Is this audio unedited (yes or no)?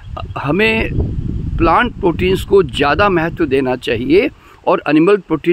yes